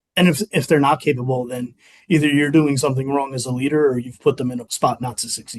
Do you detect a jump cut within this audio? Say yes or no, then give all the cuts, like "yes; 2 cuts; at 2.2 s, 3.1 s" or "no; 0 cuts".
yes; 1 cut; at 4.7 s